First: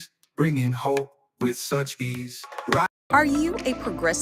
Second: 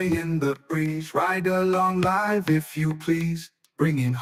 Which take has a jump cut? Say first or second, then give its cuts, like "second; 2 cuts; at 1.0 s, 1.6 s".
first; 1 cut; at 2.9 s